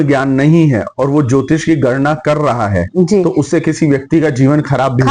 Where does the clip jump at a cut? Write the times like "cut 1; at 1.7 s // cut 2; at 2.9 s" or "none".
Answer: none